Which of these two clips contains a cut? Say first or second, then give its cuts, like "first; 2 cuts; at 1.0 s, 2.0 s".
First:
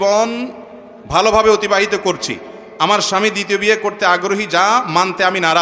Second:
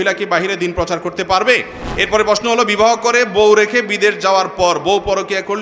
second; 1 cut; at 1.8 s